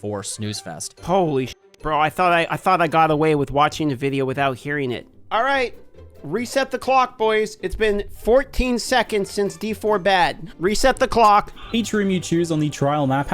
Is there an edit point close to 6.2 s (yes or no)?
no